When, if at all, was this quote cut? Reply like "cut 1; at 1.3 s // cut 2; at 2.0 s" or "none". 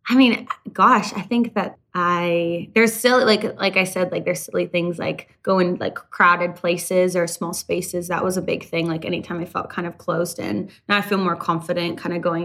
cut 1; at 1.7 s